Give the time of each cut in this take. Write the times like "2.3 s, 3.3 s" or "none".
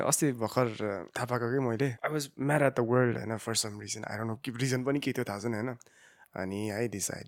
1.1 s, 2.0 s

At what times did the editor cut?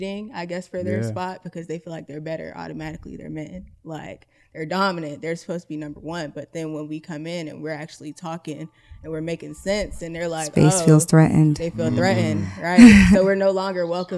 none

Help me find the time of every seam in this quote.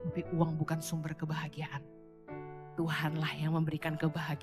none

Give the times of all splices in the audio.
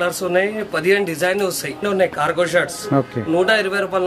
1.8 s

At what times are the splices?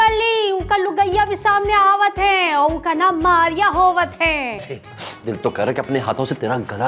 4.7 s

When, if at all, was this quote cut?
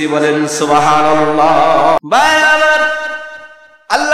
2.0 s

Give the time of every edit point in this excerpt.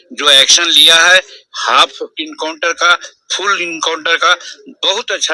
none

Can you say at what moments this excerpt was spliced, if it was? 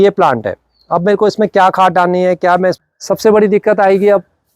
2.8 s

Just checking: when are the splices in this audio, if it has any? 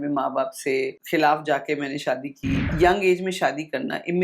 1.0 s, 2.7 s

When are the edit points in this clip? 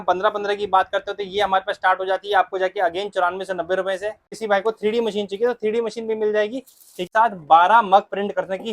4.3 s, 7.1 s

